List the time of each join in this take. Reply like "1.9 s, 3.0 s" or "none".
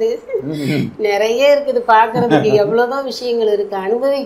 none